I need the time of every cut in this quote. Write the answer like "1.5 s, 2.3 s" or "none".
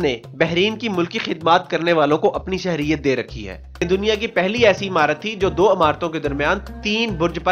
3.8 s